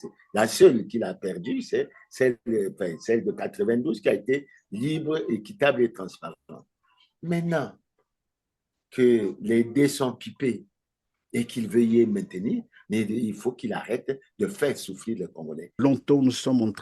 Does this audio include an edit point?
yes; 1 cut; at 15.8 s

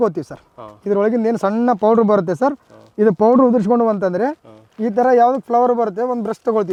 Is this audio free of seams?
yes; 0 cuts

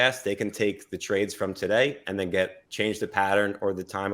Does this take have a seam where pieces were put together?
no; 0 cuts

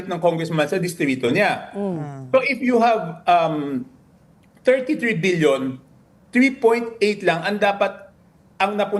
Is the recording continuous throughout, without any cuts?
yes; 0 cuts

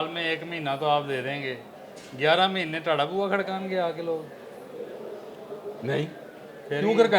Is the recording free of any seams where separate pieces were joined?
yes; 0 cuts

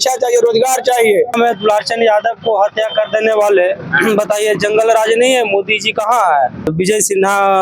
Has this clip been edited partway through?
yes; 2 cuts; at 1.3 s, 6.7 s

